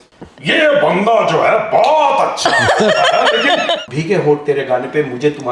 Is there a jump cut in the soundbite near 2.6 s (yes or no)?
no